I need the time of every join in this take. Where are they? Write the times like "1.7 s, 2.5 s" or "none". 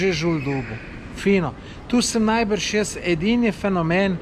none